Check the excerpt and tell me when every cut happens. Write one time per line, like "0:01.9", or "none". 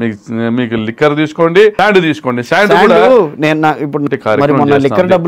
0:01.7
0:04.0